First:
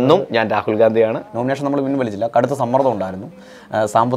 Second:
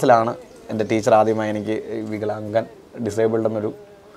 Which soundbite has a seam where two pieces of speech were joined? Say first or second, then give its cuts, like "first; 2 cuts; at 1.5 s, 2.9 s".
first; 1 cut; at 1.2 s